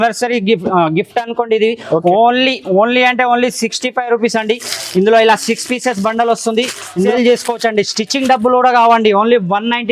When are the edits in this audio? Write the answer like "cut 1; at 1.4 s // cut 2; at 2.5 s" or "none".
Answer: cut 1; at 6.9 s